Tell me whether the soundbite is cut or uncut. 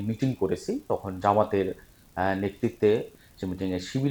cut